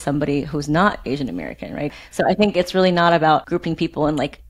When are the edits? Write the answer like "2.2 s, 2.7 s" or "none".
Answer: 2.0 s, 3.5 s